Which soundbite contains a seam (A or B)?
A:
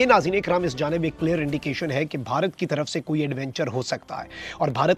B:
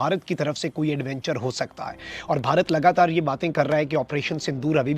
B